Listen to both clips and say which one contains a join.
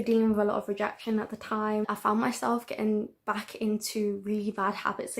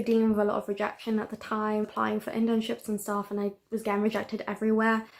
first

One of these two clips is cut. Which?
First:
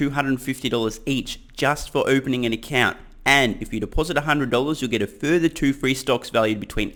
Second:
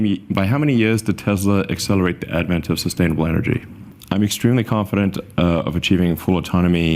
second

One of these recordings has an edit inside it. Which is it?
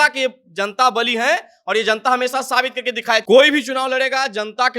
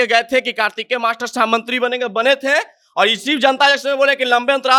first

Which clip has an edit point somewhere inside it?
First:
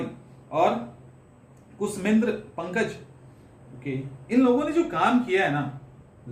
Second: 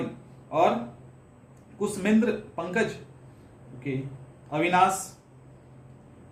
first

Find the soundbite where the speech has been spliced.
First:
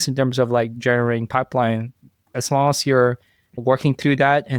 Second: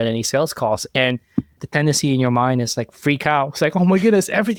first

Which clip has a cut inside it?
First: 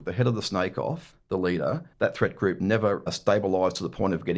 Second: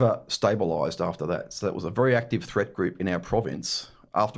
first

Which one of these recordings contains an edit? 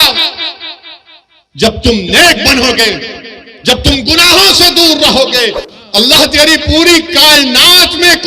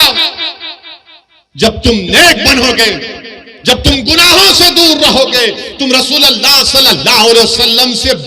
first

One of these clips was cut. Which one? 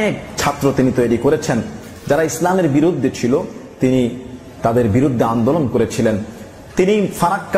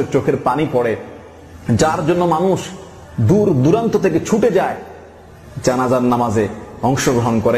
first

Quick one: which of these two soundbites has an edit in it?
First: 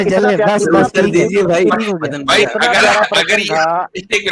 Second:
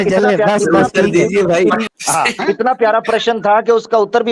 second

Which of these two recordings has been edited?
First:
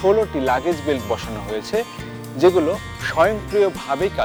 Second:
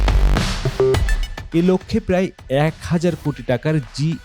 second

